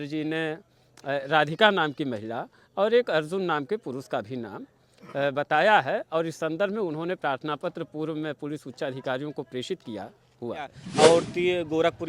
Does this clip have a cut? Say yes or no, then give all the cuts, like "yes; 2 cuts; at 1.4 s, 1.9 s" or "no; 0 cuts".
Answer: yes; 1 cut; at 10.8 s